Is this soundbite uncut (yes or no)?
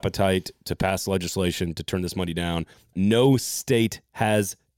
no